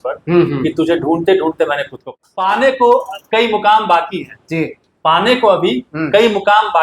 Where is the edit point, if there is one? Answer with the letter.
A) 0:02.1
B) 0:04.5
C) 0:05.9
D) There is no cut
A